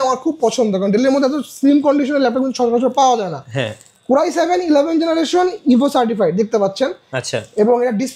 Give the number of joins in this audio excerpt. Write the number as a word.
zero